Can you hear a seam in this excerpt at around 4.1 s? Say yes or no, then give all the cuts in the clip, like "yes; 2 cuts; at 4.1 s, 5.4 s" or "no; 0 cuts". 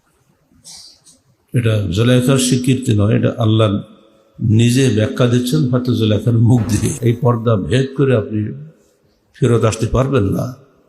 no; 1 cut; at 7.0 s